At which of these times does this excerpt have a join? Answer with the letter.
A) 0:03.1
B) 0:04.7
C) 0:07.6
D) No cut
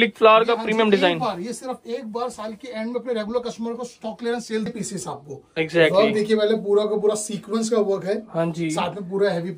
B